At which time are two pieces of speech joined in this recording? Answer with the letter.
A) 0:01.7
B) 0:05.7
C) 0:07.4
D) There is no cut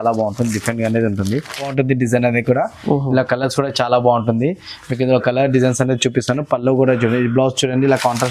A